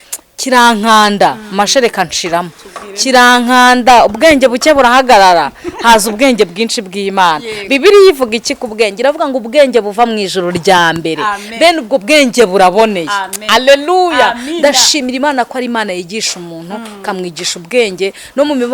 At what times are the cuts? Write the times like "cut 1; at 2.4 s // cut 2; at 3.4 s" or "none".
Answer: none